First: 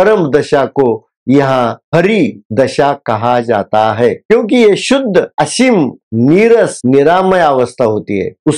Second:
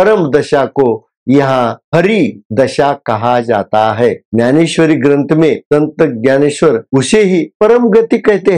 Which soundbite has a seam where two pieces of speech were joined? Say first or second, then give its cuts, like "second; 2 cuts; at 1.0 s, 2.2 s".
first; 1 cut; at 4.2 s